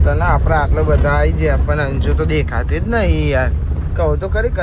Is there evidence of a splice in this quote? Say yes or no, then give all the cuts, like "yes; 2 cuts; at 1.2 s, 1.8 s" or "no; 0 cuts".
no; 0 cuts